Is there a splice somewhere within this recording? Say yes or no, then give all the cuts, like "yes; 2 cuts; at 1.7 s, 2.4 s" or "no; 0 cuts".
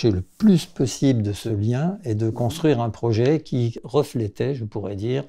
yes; 2 cuts; at 1.4 s, 3.8 s